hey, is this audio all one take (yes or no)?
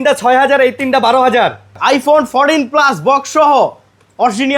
no